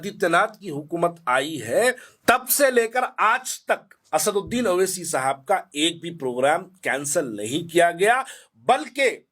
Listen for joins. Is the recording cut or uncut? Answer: cut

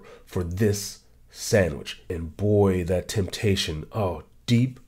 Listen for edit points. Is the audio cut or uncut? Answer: cut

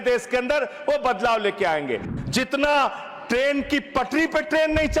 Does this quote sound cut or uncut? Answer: cut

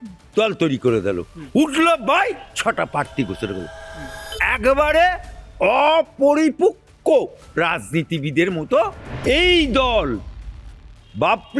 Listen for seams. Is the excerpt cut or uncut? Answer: cut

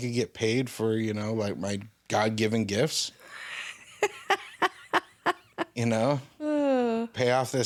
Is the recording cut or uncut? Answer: uncut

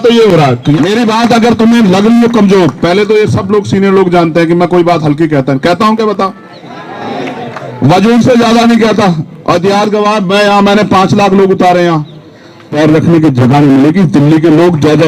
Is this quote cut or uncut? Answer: cut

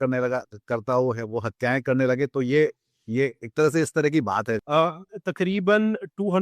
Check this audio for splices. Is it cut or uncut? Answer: cut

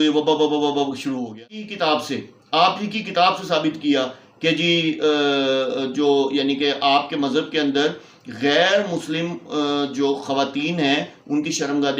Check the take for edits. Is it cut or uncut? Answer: cut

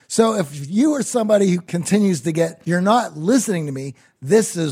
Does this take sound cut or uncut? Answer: cut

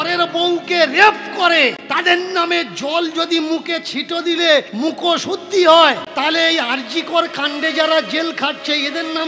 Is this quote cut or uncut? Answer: cut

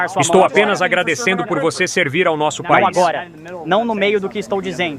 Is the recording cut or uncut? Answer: uncut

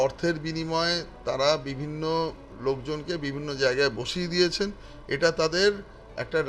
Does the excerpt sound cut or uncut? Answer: uncut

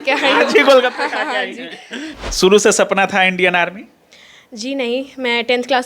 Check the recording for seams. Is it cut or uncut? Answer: cut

